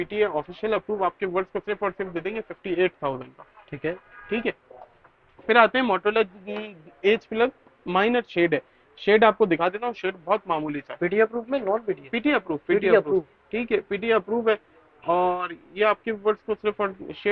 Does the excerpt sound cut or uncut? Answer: uncut